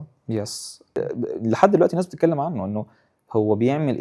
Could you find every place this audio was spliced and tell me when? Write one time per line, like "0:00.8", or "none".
0:01.0